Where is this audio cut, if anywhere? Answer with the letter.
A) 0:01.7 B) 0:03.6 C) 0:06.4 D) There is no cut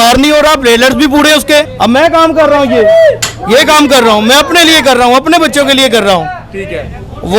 A